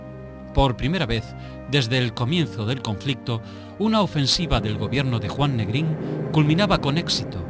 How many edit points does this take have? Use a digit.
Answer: 1